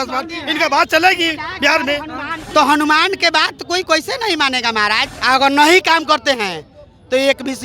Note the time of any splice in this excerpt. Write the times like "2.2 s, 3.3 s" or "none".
2.3 s, 5.1 s

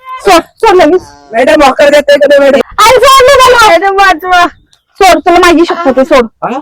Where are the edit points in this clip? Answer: 2.7 s

